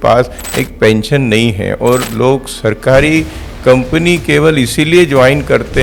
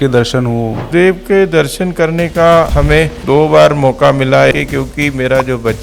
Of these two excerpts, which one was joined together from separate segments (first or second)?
second